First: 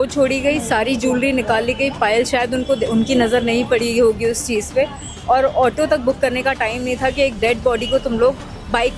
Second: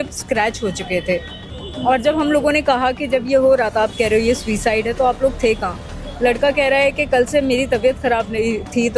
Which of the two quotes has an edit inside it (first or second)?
second